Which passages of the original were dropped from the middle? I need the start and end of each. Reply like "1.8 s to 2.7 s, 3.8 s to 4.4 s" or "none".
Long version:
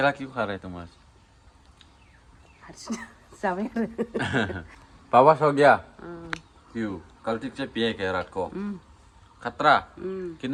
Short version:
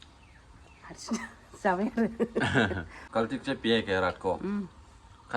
4.8 s to 7.1 s